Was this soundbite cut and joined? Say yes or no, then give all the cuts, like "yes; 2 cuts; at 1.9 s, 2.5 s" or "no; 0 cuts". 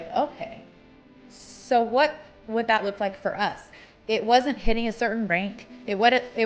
no; 0 cuts